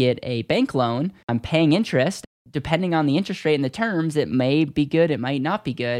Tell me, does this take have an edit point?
yes; 2 cuts; at 1.2 s, 2.3 s

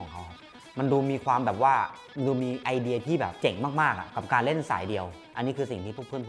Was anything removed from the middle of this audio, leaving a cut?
yes; 1 cut; at 5.2 s

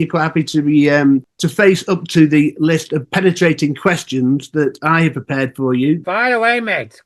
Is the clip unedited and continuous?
no; 2 cuts; at 1.4 s, 6.0 s

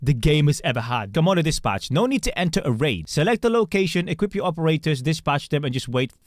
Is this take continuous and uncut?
no; 1 cut; at 1.1 s

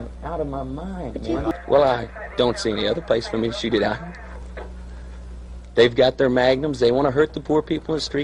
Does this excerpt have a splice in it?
yes; 1 cut; at 1.5 s

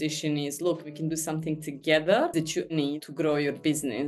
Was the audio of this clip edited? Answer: yes; 2 cuts; at 1.0 s, 2.7 s

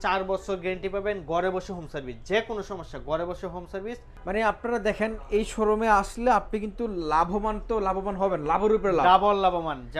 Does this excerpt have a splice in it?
yes; 1 cut; at 4.1 s

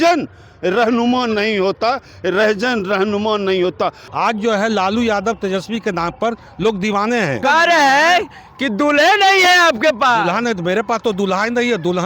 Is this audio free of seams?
no; 2 cuts; at 4.0 s, 7.4 s

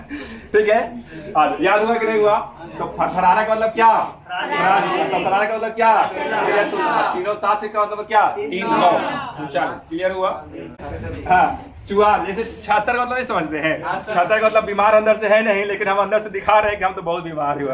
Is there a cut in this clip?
yes; 1 cut; at 10.8 s

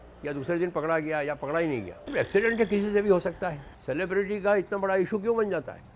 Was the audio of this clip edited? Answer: yes; 2 cuts; at 2.0 s, 3.7 s

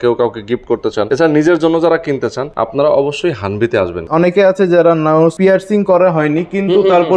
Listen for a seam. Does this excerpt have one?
yes; 4 cuts; at 1.1 s, 2.4 s, 4.0 s, 5.3 s

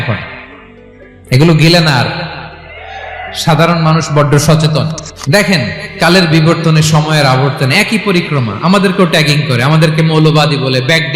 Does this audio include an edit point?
yes; 1 cut; at 5.1 s

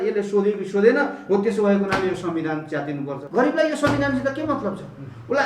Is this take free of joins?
no; 1 cut; at 3.2 s

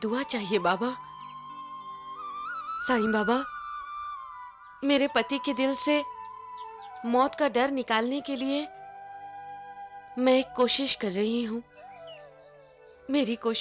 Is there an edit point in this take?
no; 0 cuts

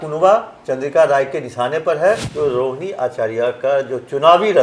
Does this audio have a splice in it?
yes; 1 cut; at 2.3 s

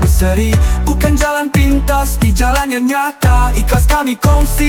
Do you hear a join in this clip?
no; 0 cuts

